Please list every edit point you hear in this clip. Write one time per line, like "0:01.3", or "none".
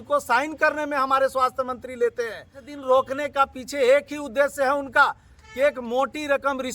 0:02.7